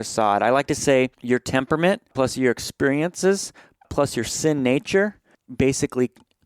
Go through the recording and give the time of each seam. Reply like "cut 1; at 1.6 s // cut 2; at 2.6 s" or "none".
cut 1; at 1.2 s // cut 2; at 2.1 s // cut 3; at 3.9 s // cut 4; at 5.4 s